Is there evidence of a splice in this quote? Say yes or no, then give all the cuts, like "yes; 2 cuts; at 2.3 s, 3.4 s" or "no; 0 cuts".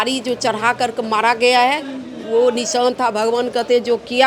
no; 0 cuts